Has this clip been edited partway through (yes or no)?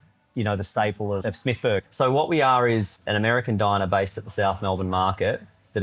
yes